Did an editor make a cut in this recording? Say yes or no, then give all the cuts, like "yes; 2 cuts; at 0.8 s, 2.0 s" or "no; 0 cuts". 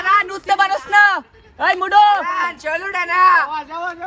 no; 0 cuts